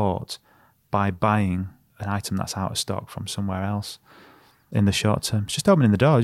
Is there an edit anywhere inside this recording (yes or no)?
yes